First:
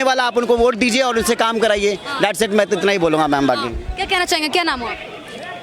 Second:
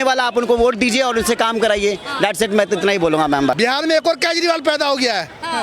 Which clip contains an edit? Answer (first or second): second